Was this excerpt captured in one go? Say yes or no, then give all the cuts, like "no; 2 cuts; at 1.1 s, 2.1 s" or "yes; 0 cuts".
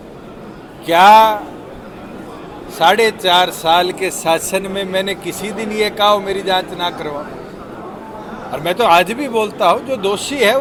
yes; 0 cuts